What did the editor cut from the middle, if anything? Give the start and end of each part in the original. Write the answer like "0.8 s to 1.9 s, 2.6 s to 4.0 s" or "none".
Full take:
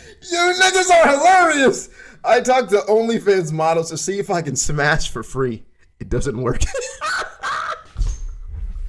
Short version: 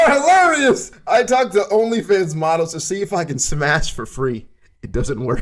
1.9 s to 2.1 s